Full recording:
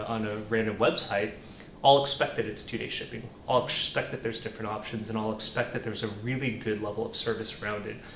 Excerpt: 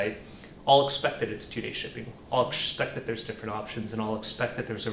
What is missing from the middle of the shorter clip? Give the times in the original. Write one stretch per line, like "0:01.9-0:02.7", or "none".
none